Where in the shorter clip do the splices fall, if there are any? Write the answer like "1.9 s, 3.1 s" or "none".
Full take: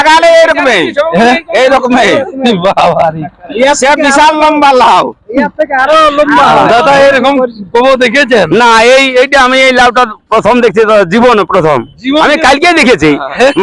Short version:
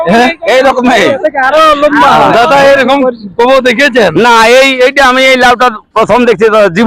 1.2 s